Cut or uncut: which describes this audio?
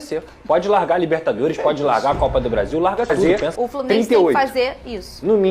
cut